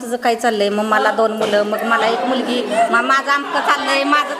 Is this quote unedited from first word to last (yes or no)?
yes